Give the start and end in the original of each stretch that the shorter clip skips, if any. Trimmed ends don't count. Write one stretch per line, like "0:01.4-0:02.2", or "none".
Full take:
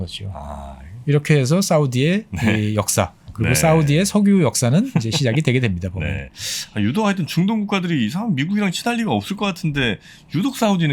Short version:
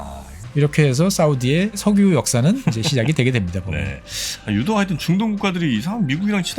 0:02.3-0:04.1